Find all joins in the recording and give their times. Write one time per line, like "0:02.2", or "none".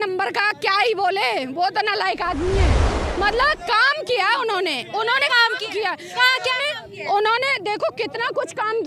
0:03.0